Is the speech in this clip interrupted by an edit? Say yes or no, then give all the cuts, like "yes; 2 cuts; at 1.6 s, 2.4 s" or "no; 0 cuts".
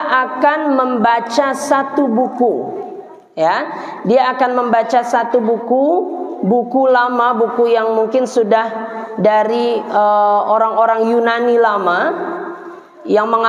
no; 0 cuts